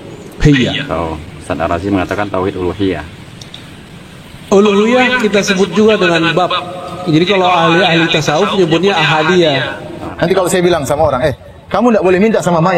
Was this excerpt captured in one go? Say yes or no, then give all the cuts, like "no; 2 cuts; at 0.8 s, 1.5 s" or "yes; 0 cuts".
no; 1 cut; at 10.0 s